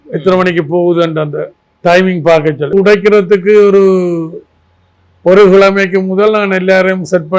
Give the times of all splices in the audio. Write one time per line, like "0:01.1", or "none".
0:02.7